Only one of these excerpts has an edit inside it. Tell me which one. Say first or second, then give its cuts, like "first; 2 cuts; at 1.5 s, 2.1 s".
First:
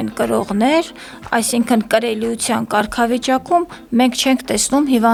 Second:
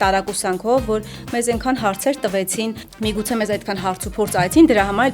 second; 1 cut; at 2.8 s